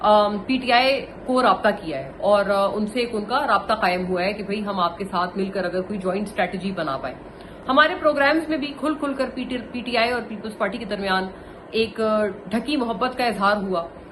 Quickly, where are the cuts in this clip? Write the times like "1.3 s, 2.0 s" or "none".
none